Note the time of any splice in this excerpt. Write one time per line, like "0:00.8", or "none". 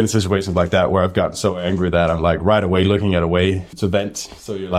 0:03.7